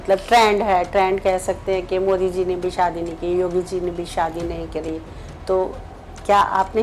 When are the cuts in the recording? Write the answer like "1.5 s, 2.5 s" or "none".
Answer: none